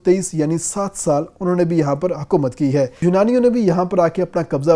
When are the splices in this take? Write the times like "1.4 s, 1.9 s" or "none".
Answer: 3.0 s